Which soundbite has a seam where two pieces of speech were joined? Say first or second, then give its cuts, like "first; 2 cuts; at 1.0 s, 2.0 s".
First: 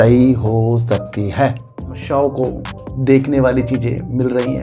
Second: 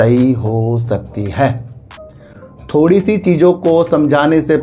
first; 1 cut; at 2.0 s